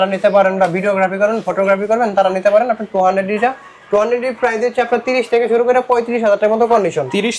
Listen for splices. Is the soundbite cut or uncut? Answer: uncut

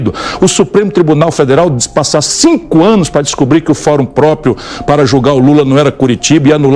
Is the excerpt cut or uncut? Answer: uncut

